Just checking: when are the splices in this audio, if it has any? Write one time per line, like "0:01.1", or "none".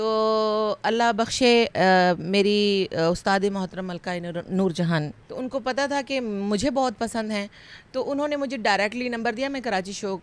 0:05.2